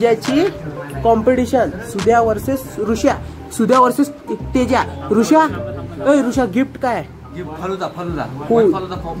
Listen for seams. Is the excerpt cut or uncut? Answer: uncut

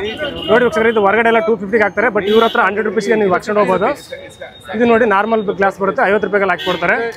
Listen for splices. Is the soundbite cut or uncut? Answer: uncut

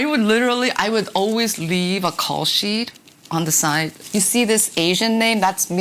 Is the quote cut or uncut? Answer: cut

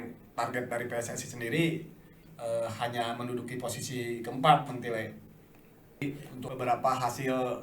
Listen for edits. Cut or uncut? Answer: cut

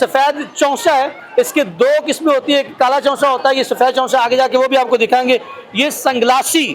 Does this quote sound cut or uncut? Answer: uncut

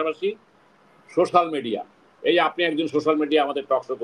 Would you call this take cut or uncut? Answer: uncut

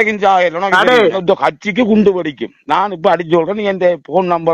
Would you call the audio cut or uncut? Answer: cut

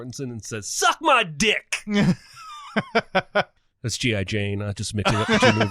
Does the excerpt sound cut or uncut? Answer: cut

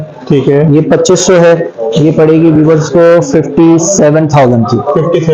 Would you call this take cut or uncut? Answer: uncut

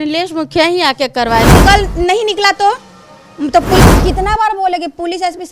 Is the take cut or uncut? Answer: cut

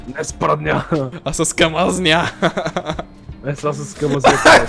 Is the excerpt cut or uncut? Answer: cut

